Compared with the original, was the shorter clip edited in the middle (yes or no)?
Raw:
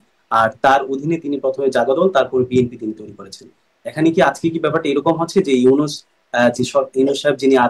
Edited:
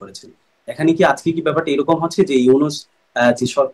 no